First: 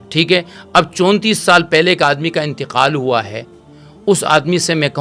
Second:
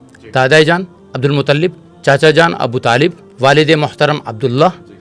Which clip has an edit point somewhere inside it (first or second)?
second